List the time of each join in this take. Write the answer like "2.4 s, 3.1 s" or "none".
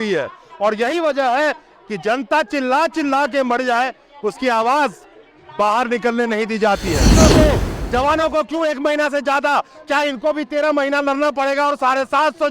7.2 s